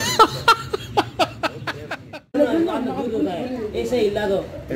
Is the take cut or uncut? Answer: cut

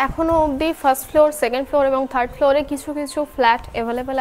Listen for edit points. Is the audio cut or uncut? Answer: uncut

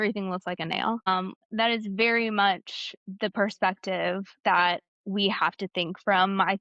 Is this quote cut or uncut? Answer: cut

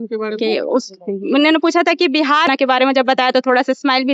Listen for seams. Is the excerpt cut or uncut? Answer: cut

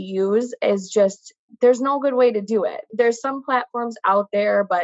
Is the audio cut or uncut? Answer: cut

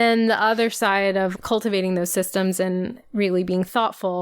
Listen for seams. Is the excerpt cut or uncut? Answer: cut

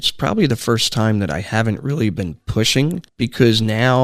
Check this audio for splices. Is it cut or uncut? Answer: cut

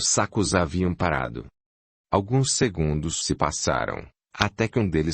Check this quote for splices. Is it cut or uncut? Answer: uncut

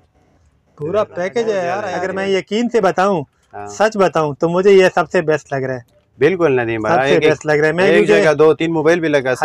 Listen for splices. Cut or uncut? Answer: cut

